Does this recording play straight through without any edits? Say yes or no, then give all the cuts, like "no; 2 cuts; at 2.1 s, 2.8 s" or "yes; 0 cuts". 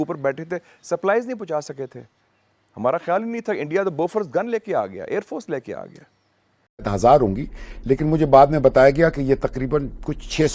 no; 1 cut; at 6.9 s